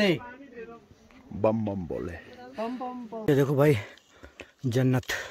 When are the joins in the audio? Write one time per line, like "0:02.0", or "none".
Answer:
0:03.3